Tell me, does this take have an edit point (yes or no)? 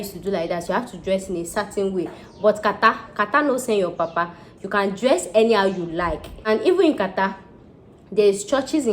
yes